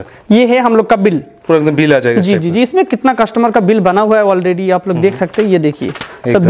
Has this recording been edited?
no; 0 cuts

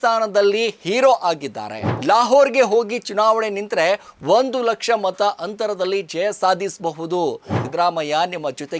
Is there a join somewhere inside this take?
yes; 2 cuts; at 1.9 s, 7.6 s

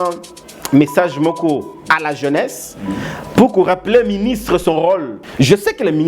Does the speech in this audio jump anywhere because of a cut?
yes; 1 cut; at 5.2 s

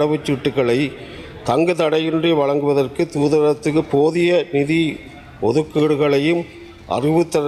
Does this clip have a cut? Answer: no; 0 cuts

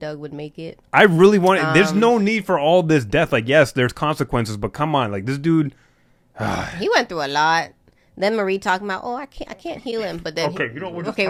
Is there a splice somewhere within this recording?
no; 0 cuts

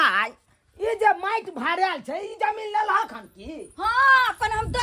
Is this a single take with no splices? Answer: yes; 0 cuts

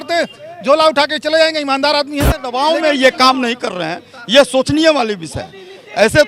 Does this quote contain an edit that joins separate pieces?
yes; 1 cut; at 2.5 s

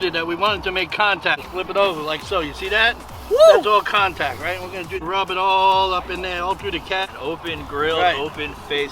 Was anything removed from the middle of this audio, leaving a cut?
yes; 3 cuts; at 1.4 s, 5.0 s, 7.1 s

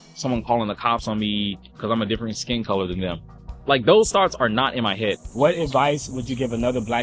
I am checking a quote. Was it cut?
yes; 1 cut; at 5.3 s

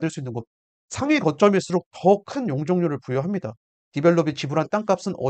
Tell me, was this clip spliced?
yes; 1 cut; at 3.8 s

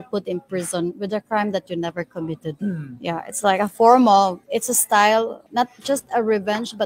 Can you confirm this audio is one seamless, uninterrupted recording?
no; 3 cuts; at 2.5 s, 4.4 s, 5.4 s

